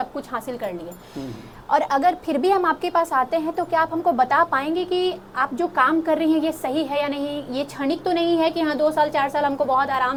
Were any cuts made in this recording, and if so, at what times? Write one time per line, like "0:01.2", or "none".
none